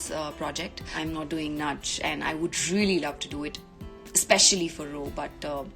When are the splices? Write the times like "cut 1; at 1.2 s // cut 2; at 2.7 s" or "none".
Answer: cut 1; at 1.0 s

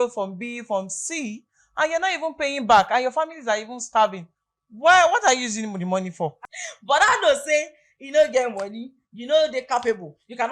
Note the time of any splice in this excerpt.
cut 1; at 6.4 s

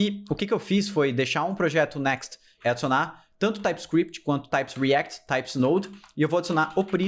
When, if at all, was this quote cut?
cut 1; at 2.5 s

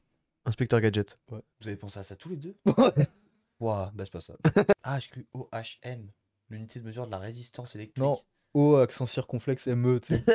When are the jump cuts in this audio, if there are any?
cut 1; at 4.7 s

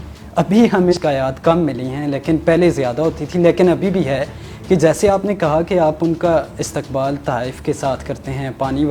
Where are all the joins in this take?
cut 1; at 0.9 s

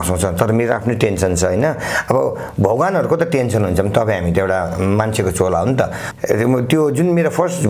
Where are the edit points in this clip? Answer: cut 1; at 6.0 s

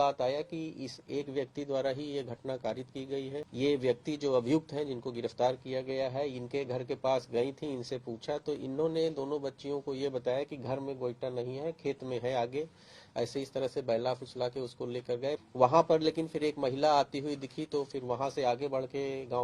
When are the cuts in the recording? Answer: cut 1; at 3.4 s // cut 2; at 15.4 s

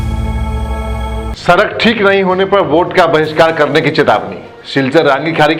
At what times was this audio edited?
cut 1; at 1.3 s

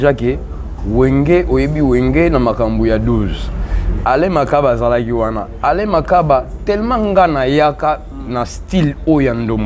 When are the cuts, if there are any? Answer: none

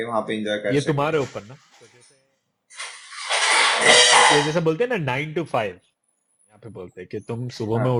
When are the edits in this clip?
none

